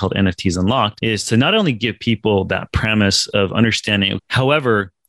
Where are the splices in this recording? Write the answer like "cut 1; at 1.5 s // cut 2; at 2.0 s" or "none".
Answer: cut 1; at 1.0 s // cut 2; at 4.2 s